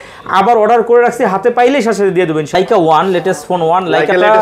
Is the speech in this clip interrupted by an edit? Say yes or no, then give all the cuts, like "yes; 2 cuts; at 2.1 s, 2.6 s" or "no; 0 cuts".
yes; 1 cut; at 2.5 s